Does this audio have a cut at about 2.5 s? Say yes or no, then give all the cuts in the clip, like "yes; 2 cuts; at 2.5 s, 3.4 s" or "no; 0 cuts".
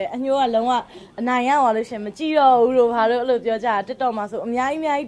no; 0 cuts